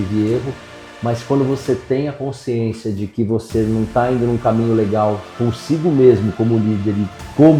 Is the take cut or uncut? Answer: uncut